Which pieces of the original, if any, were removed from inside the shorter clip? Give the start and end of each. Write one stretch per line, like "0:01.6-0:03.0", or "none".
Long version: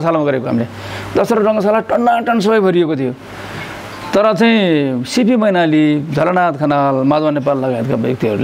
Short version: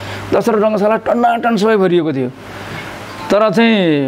none